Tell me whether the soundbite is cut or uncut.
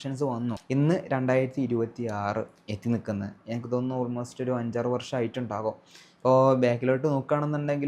uncut